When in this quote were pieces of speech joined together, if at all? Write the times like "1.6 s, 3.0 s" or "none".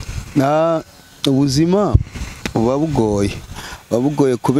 none